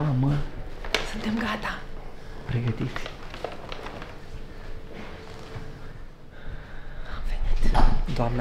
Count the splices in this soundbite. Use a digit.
0